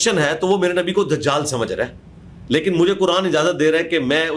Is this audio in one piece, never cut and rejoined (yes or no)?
yes